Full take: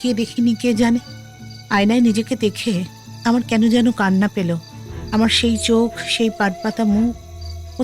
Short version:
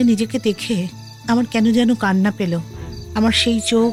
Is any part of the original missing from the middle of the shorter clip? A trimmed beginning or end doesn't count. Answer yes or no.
no